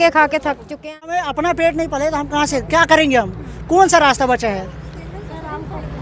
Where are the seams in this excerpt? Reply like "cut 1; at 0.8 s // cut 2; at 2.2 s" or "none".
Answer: cut 1; at 1.3 s